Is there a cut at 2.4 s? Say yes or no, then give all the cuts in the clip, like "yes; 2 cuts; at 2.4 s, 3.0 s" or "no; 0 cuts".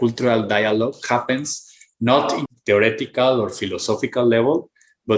yes; 1 cut; at 2.4 s